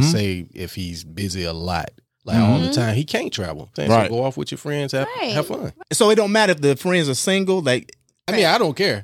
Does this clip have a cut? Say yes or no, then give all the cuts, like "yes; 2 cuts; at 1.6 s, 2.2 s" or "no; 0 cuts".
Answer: yes; 3 cuts; at 3.7 s, 5.7 s, 8.3 s